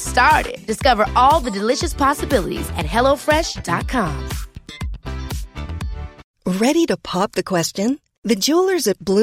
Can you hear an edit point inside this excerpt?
yes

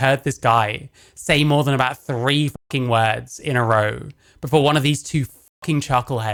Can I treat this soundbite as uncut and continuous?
yes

